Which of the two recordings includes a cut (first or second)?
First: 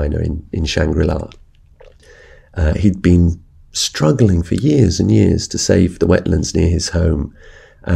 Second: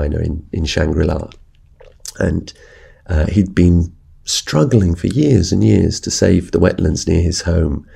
first